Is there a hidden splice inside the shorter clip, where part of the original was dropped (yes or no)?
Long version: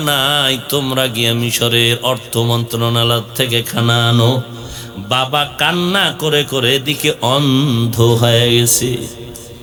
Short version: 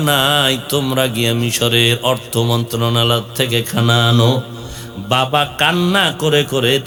no